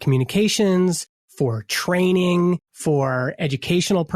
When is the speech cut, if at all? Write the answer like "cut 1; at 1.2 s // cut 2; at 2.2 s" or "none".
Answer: cut 1; at 2.7 s